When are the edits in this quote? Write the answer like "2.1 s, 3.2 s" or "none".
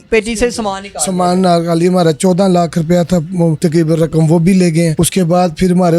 3.6 s, 5.0 s

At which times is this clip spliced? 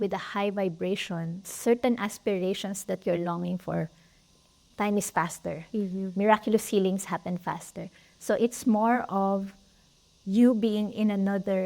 1.5 s, 4.6 s

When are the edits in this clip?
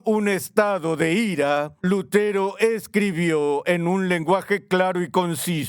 1.7 s

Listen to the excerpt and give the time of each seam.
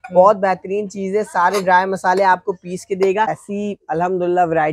3.4 s

